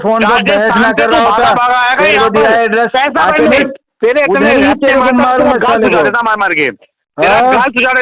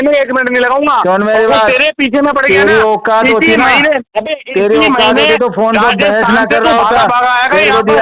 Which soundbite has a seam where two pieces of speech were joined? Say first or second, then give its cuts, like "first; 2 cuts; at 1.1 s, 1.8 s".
first; 1 cut; at 3.9 s